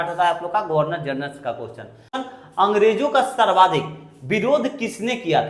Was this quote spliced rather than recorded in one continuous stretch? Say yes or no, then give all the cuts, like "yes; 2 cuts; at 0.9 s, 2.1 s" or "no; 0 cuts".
yes; 1 cut; at 2.1 s